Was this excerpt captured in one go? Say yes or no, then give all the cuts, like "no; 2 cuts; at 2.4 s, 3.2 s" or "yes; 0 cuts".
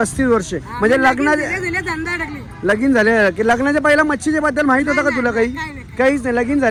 yes; 0 cuts